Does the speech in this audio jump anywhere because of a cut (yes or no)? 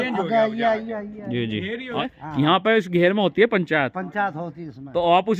yes